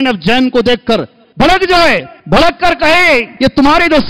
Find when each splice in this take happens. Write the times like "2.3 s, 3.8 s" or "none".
1.2 s, 2.1 s, 3.3 s

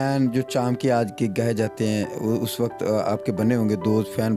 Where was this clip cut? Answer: none

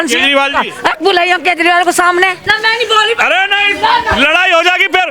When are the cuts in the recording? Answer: 2.5 s

